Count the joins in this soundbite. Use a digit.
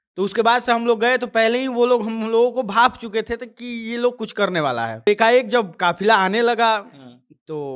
1